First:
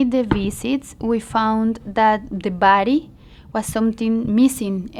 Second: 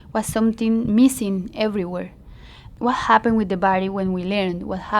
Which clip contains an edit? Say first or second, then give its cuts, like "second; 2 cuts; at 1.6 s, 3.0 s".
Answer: second; 1 cut; at 2.7 s